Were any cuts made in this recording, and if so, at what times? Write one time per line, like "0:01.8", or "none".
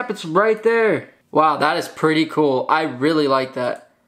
0:01.2

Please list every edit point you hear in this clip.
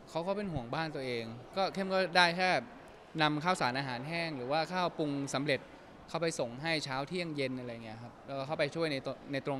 none

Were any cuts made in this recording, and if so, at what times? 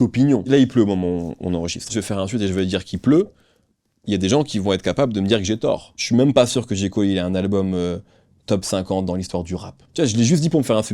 0:01.9
0:05.9
0:09.8

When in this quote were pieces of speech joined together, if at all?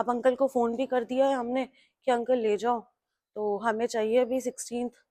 none

